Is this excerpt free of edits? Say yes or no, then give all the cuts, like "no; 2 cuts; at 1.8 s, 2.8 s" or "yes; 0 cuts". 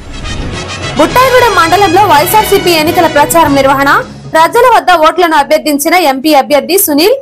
yes; 0 cuts